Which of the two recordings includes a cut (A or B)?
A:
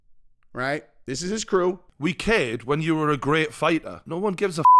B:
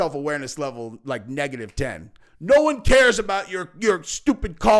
A